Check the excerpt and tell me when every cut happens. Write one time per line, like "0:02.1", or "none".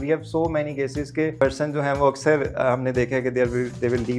0:01.4